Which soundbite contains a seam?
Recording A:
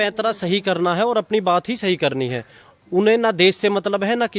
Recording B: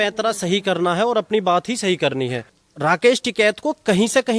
B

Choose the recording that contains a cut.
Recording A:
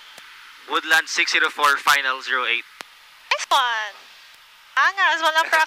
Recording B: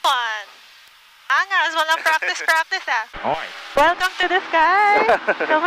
B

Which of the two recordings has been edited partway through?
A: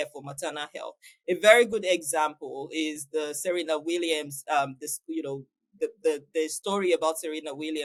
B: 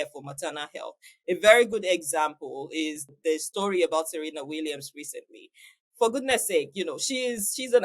B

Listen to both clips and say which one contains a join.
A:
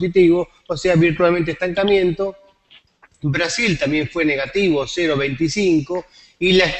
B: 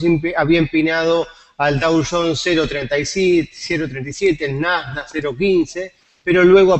B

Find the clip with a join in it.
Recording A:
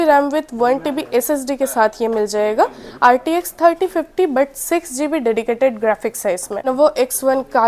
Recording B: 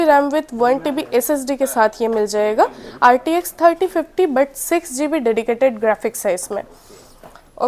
A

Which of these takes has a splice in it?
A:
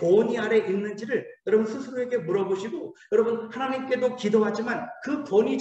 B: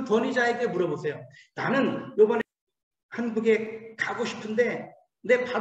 B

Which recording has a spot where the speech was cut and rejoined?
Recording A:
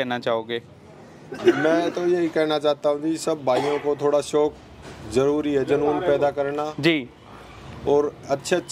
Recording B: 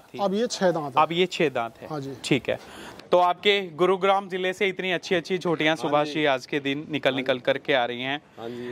B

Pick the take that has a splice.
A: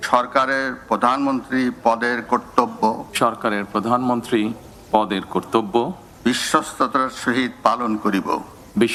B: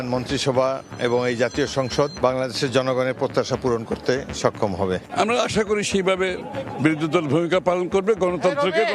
B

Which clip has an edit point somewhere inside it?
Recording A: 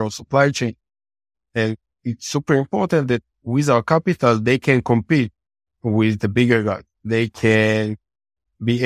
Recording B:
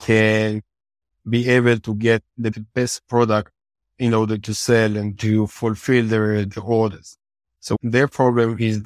B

